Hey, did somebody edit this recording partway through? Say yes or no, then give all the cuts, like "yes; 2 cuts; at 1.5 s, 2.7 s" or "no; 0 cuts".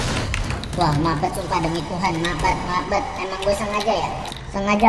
no; 0 cuts